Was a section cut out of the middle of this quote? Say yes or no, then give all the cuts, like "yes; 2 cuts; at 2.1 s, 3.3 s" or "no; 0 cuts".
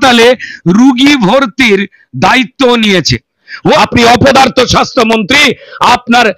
yes; 1 cut; at 3.8 s